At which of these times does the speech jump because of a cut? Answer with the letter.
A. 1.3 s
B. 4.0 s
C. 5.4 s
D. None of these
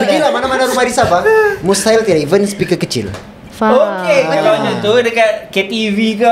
D